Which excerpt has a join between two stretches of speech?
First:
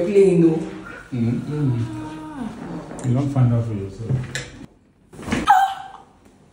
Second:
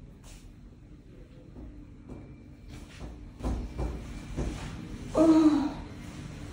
first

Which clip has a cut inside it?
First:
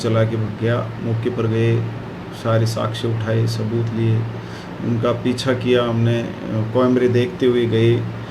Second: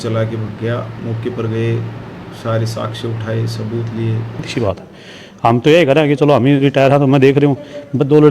second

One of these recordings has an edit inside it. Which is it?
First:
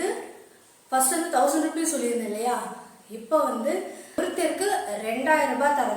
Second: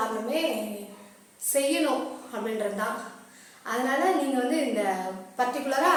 first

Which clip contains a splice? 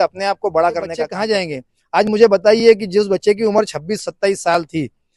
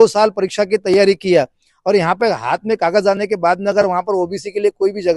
first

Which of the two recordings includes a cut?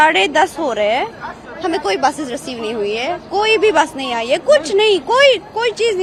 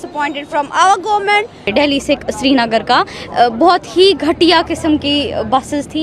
second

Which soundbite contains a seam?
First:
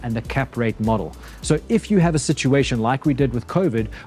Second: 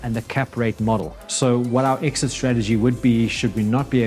second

